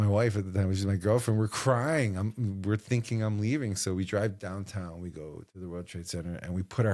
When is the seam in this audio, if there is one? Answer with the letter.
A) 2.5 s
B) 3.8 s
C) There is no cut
C